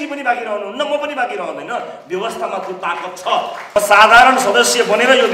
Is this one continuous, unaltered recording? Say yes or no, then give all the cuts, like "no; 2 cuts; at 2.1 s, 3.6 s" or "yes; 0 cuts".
no; 1 cut; at 3.6 s